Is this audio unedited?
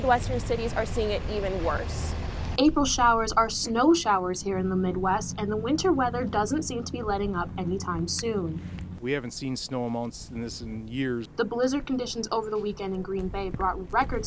yes; 0 cuts

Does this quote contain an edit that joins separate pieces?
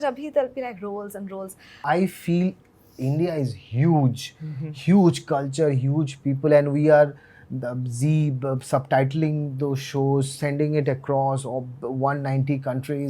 yes; 1 cut; at 1.7 s

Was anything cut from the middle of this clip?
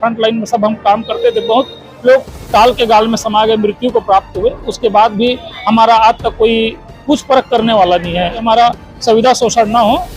yes; 1 cut; at 8.4 s

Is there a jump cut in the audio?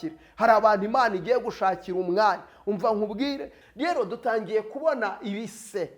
yes; 1 cut; at 3.5 s

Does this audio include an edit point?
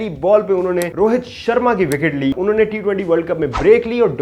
yes; 2 cuts; at 0.9 s, 2.3 s

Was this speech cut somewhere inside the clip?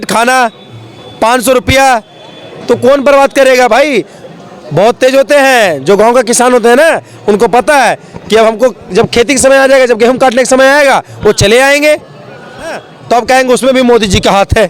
yes; 1 cut; at 12.9 s

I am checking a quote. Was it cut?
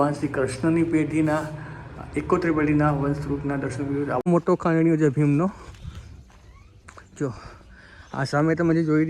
yes; 1 cut; at 4.3 s

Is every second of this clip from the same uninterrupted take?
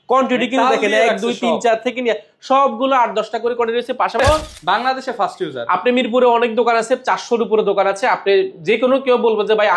no; 1 cut; at 4.2 s

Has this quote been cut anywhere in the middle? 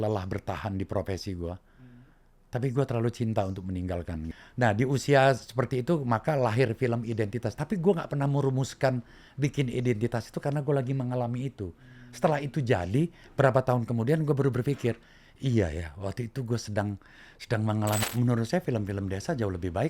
yes; 2 cuts; at 4.3 s, 18.0 s

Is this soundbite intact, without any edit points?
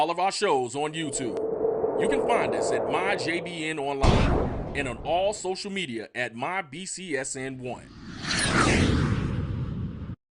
yes; 0 cuts

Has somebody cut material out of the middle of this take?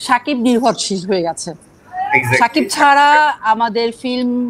no; 0 cuts

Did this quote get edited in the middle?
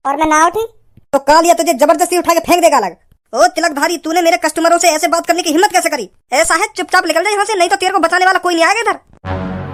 no; 0 cuts

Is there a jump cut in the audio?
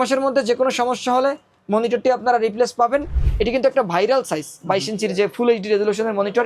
yes; 1 cut; at 3.2 s

